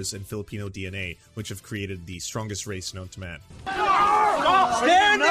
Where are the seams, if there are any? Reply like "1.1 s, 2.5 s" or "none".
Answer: 3.7 s